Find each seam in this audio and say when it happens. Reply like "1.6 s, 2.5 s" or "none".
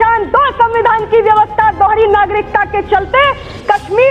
none